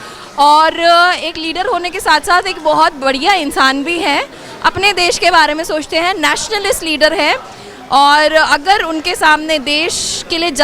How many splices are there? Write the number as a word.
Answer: zero